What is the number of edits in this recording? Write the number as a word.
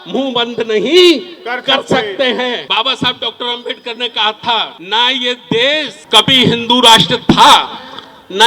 three